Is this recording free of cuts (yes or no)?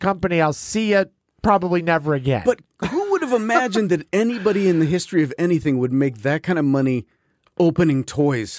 yes